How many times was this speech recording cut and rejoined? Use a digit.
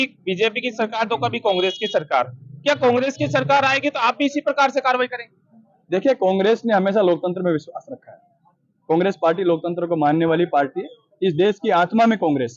0